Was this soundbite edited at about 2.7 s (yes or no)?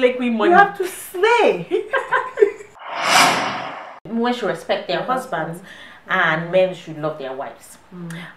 yes